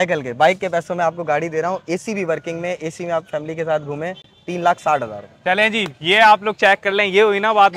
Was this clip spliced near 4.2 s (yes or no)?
no